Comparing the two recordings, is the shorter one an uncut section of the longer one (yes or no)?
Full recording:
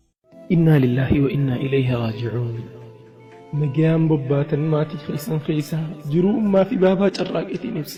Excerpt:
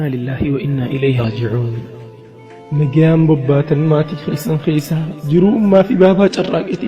no